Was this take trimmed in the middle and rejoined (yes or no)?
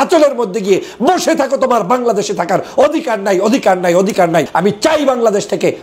yes